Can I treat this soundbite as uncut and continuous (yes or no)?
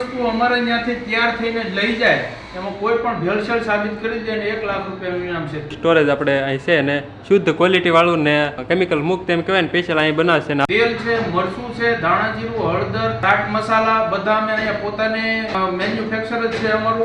no